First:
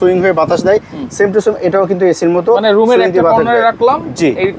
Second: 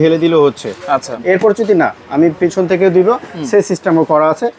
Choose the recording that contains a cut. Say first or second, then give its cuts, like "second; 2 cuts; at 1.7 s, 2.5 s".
second; 1 cut; at 1.1 s